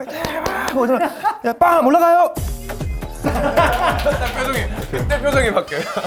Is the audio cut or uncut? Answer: uncut